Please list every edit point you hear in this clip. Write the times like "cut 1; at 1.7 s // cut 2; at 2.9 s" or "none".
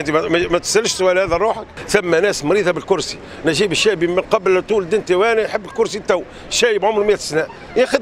cut 1; at 1.7 s